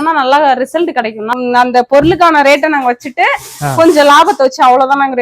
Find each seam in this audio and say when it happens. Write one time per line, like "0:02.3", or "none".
0:01.3